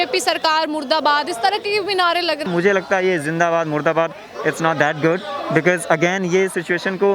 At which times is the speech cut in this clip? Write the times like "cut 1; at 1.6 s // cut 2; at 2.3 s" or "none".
cut 1; at 2.4 s